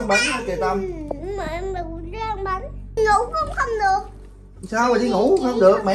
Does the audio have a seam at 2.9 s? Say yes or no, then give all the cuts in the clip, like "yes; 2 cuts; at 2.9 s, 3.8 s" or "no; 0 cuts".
yes; 1 cut; at 2.9 s